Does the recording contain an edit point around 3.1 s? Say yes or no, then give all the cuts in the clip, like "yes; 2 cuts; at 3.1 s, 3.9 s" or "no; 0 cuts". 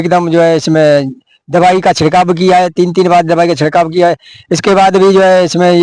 no; 0 cuts